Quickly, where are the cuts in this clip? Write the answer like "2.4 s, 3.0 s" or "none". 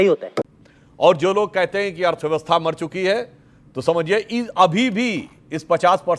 none

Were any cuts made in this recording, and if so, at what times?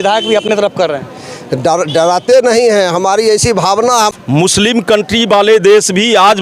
4.1 s

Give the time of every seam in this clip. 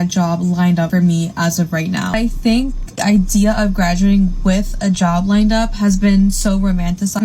2.1 s

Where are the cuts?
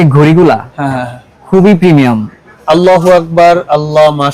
2.5 s

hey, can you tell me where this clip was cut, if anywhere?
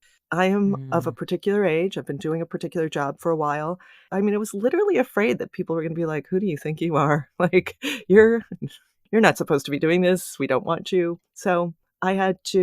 4.0 s, 11.5 s

